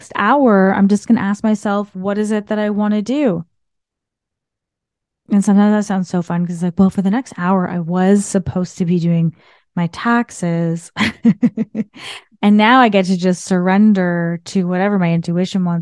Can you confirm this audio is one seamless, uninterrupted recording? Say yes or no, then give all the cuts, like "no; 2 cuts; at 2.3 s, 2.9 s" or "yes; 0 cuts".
yes; 0 cuts